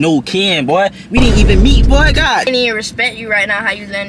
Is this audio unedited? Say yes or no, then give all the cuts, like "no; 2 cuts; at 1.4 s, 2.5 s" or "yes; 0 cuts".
no; 1 cut; at 2.4 s